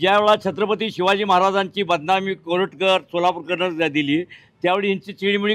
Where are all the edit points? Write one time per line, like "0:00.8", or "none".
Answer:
none